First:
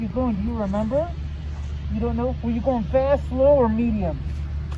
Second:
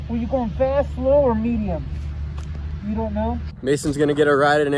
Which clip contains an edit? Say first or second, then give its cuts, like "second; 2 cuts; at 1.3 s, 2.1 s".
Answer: second; 1 cut; at 3.5 s